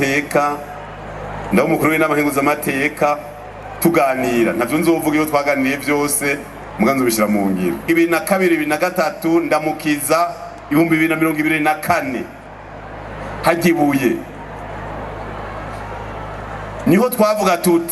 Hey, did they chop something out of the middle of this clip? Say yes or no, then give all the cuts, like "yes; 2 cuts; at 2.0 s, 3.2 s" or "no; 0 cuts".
yes; 1 cut; at 7.9 s